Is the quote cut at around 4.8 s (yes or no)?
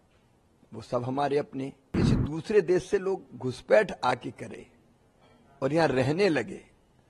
no